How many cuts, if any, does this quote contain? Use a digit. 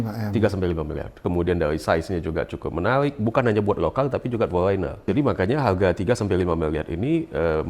2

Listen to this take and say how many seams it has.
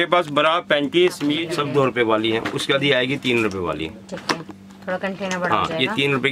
1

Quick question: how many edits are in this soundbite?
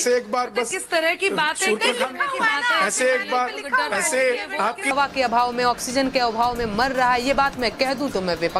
1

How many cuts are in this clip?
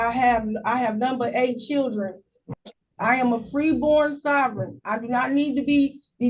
1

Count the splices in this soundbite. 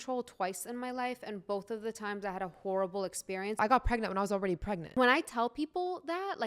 2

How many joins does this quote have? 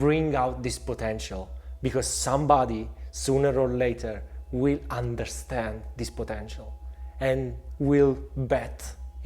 1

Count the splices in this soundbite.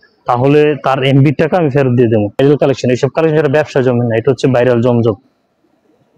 1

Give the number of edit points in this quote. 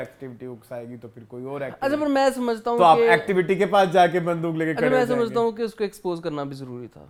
0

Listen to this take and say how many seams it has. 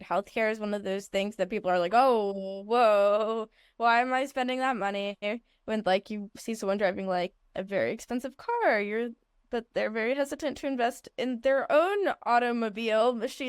0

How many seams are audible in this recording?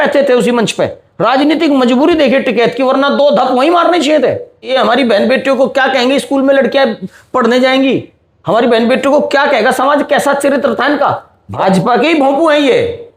2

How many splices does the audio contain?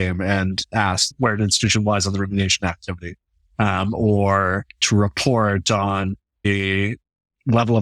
2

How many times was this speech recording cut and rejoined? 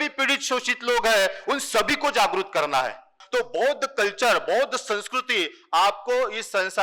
1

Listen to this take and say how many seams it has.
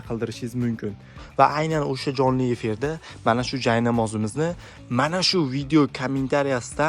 1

